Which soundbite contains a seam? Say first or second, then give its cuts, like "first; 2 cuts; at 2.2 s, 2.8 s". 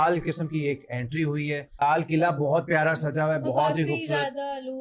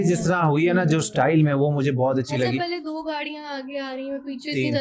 first; 1 cut; at 1.8 s